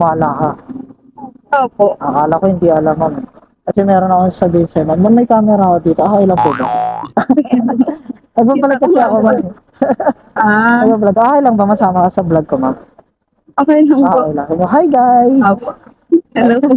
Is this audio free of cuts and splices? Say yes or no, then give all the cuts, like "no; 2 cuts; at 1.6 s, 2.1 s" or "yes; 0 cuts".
yes; 0 cuts